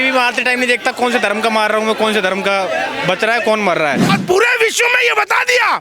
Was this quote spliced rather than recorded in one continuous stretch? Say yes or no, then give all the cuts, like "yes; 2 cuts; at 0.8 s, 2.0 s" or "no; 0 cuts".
yes; 1 cut; at 4.2 s